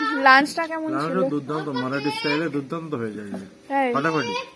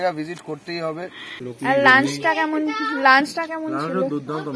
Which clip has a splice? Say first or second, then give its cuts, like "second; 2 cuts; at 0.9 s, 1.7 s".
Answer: second; 1 cut; at 1.4 s